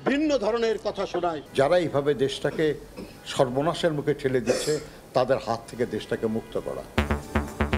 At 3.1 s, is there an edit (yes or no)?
no